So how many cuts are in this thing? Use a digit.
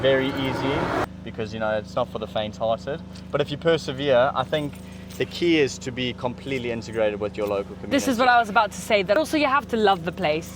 2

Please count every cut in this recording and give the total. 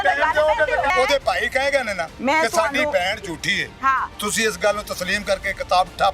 2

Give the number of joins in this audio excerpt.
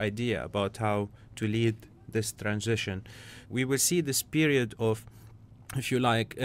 1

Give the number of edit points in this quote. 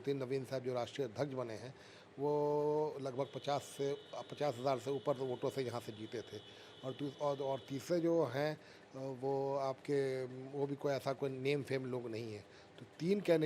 0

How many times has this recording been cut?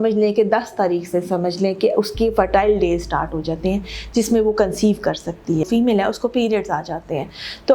1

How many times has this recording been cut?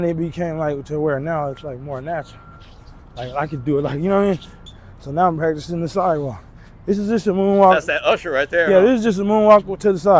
1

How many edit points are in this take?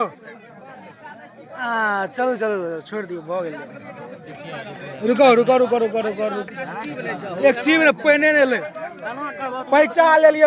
1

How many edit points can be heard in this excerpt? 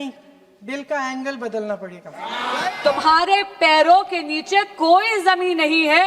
1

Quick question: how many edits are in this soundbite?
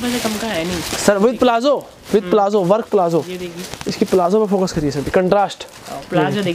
0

